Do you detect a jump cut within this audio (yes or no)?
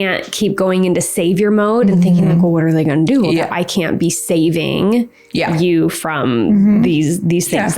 yes